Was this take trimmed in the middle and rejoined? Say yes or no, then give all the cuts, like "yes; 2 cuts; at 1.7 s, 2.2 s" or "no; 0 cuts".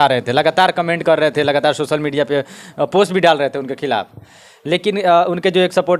no; 0 cuts